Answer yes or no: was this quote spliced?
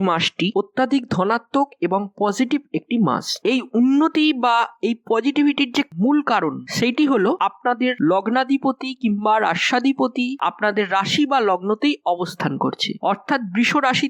no